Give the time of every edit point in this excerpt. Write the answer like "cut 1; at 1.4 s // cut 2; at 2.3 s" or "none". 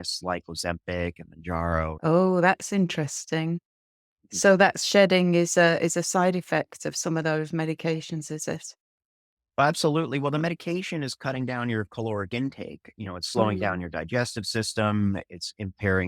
cut 1; at 2.0 s